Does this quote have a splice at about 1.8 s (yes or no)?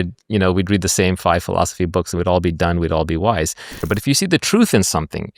no